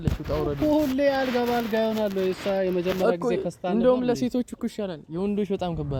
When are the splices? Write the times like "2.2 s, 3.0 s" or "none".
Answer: none